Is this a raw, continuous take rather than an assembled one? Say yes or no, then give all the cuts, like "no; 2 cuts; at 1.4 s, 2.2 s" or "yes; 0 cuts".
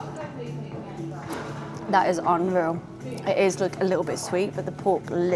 yes; 0 cuts